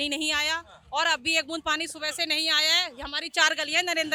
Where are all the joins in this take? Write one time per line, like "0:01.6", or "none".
none